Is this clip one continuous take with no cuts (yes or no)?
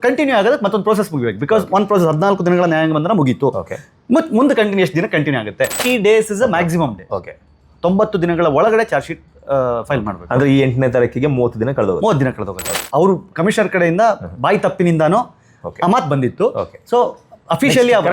no